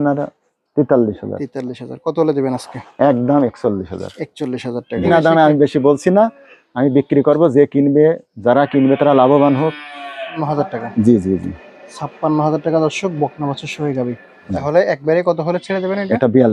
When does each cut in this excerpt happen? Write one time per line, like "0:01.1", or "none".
0:05.0
0:10.4
0:14.5